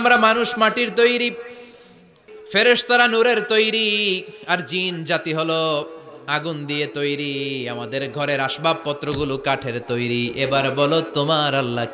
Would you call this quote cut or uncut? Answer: uncut